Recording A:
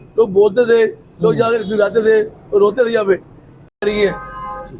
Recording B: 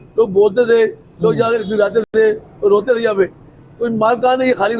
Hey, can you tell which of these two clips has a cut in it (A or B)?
A